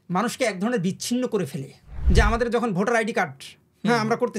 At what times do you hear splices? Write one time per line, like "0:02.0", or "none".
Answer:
0:01.9